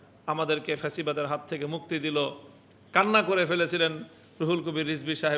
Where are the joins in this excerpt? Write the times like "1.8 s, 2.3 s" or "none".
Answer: none